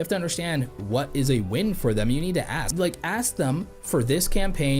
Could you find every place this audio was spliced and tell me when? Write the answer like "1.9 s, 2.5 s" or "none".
2.7 s